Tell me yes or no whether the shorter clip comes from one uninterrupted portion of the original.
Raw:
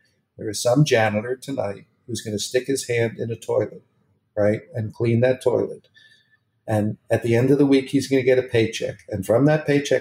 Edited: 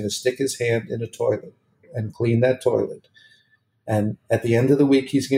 no